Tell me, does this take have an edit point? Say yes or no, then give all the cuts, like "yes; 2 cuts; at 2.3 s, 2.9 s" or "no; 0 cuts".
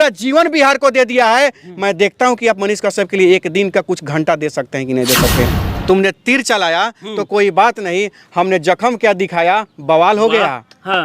yes; 1 cut; at 5.6 s